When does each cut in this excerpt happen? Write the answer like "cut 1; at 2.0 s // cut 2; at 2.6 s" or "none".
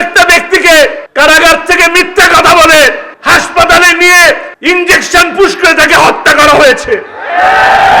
cut 1; at 1.0 s // cut 2; at 3.1 s // cut 3; at 4.5 s